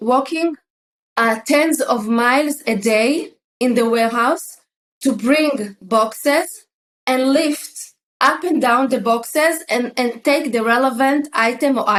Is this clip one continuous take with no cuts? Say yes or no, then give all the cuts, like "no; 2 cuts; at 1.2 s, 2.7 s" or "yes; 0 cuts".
yes; 0 cuts